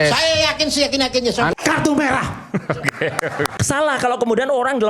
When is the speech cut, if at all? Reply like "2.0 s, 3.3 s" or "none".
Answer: 1.5 s, 3.5 s